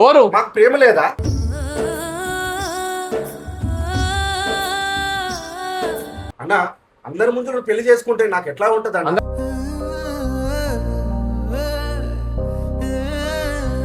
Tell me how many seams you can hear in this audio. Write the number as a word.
zero